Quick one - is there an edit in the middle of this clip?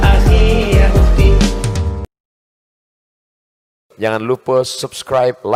no; 0 cuts

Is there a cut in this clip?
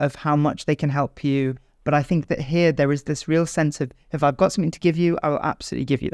no; 0 cuts

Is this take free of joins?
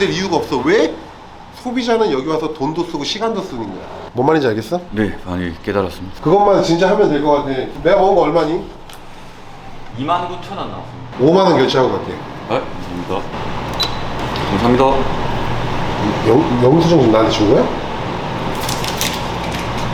yes; 0 cuts

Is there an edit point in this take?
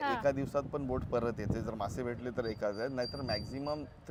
no; 0 cuts

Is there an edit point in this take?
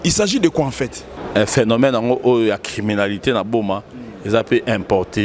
yes; 1 cut; at 1.2 s

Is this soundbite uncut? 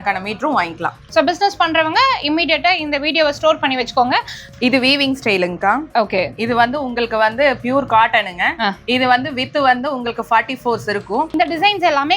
no; 3 cuts; at 1.1 s, 4.4 s, 11.3 s

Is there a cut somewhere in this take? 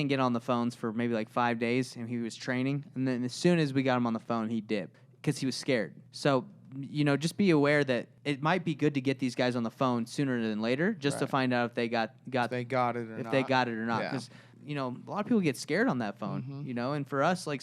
yes; 4 cuts; at 5.0 s, 6.0 s, 8.1 s, 14.5 s

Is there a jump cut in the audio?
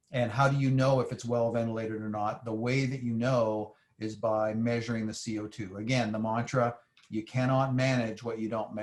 no; 0 cuts

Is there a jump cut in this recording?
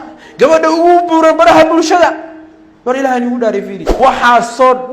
yes; 1 cut; at 3.8 s

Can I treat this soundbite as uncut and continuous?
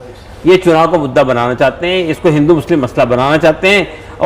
yes; 0 cuts

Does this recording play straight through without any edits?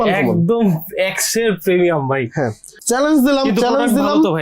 no; 1 cut; at 2.7 s

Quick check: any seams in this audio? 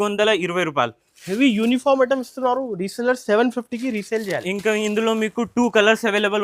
no; 0 cuts

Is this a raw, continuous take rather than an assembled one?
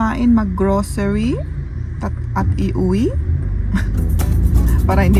yes; 0 cuts

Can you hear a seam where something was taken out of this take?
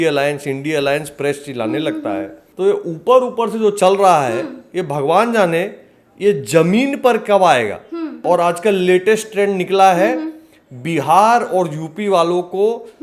yes; 2 cuts; at 2.4 s, 8.1 s

